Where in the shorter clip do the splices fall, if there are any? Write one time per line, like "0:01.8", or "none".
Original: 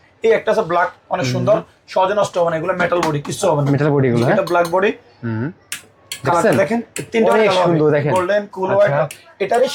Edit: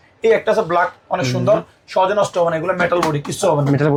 none